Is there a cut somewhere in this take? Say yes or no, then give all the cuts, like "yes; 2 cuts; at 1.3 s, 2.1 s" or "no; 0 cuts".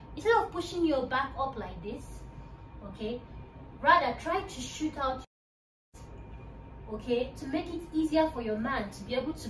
no; 0 cuts